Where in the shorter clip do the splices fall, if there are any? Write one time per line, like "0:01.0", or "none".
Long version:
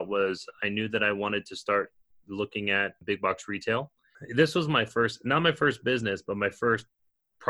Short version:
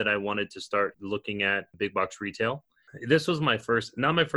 0:01.0